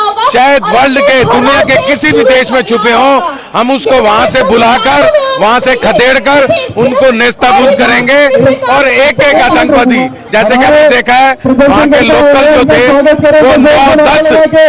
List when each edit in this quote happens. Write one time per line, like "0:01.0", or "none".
none